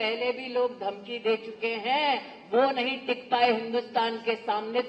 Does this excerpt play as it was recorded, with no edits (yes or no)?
yes